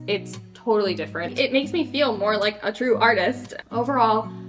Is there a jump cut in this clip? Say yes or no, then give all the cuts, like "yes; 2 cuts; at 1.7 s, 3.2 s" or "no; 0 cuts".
yes; 2 cuts; at 1.3 s, 3.5 s